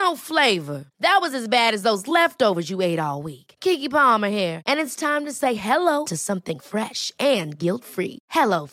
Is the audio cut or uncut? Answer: uncut